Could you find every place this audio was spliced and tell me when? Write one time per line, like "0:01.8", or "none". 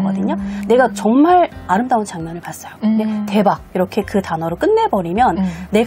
none